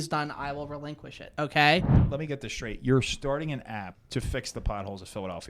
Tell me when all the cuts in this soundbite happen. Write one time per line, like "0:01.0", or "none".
0:02.0
0:04.0